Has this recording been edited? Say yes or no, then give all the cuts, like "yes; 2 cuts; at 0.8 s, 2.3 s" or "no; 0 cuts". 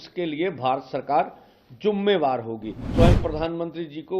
yes; 1 cut; at 2.9 s